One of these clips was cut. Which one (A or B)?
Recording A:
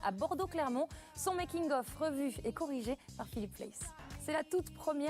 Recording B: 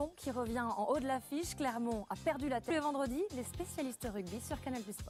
A